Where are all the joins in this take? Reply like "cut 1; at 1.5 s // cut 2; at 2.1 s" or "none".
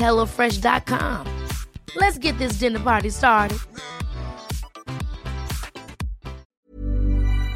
cut 1; at 6.5 s

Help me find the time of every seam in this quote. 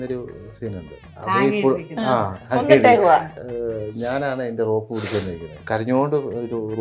cut 1; at 1.1 s // cut 2; at 2.4 s // cut 3; at 3.4 s // cut 4; at 5.5 s

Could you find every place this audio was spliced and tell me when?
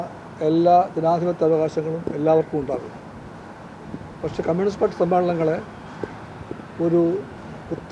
none

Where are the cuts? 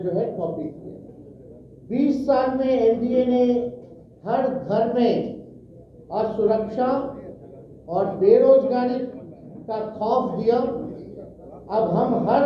cut 1; at 1.1 s

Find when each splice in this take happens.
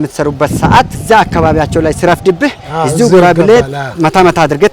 cut 1; at 1.0 s

